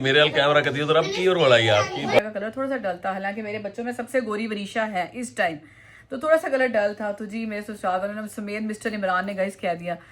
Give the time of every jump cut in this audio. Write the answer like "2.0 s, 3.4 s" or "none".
2.2 s